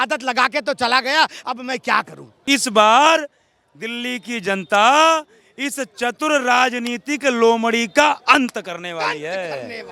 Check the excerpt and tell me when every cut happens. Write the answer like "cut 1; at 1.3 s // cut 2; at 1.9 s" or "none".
cut 1; at 2.3 s